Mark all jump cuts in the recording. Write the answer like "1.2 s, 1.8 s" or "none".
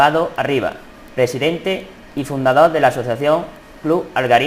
2.2 s